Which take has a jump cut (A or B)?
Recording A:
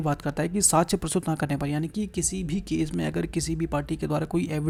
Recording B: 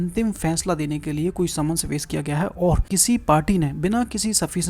B